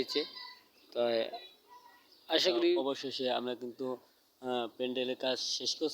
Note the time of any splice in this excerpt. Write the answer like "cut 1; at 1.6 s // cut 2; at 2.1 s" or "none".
cut 1; at 2.8 s